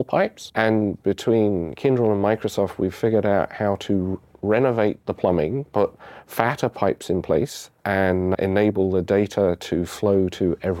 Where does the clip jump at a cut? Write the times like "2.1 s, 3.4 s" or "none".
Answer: 5.0 s, 8.0 s